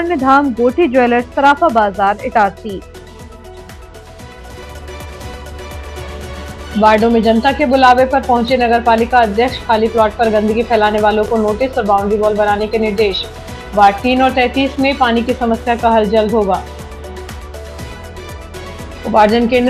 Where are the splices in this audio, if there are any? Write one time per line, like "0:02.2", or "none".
none